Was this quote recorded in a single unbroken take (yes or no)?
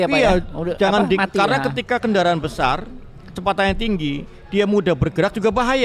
yes